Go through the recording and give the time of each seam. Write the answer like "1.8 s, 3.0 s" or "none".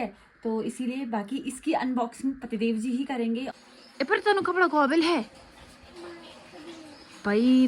3.6 s

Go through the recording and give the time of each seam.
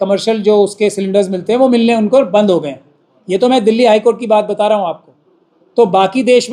none

